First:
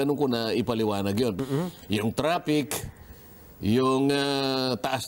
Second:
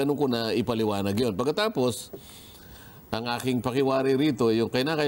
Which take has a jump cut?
first; 1 cut; at 1.4 s

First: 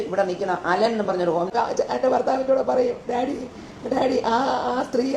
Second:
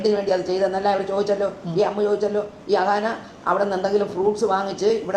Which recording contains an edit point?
first; 1 cut; at 1.5 s

